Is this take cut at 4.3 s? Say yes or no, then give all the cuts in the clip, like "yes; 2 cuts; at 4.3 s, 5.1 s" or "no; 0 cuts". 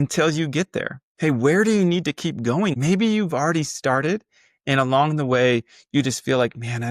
no; 2 cuts; at 1.0 s, 2.8 s